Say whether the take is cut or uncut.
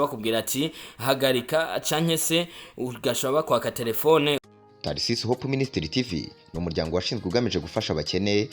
cut